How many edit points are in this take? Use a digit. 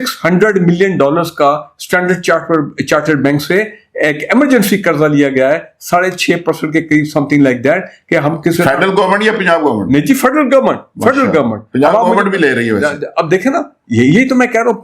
0